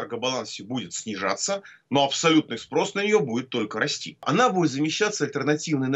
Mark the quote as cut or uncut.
cut